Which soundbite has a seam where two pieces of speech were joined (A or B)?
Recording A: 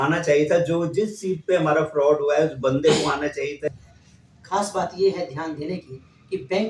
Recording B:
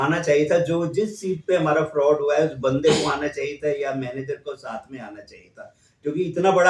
A